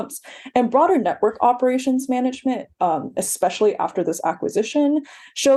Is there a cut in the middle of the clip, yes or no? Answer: no